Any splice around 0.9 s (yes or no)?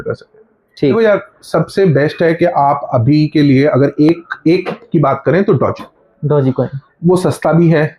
yes